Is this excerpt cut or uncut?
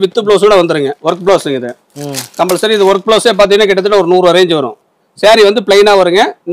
cut